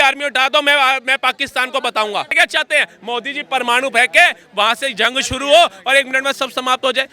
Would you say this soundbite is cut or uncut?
cut